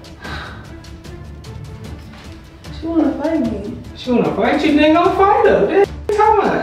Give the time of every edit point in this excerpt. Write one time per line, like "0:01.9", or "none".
none